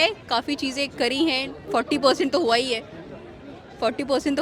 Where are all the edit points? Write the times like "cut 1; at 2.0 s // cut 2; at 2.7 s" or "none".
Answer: none